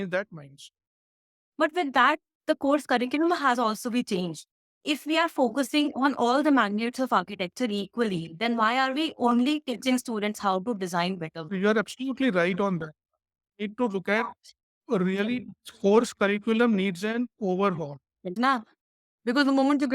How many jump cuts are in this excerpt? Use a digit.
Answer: 3